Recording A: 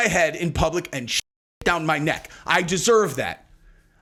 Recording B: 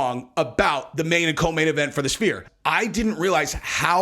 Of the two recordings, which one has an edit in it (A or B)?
B